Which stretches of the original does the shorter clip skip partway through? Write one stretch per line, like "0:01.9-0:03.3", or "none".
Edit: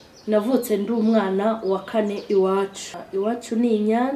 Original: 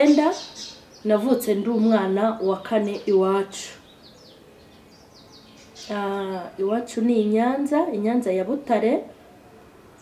0:03.7-0:06.4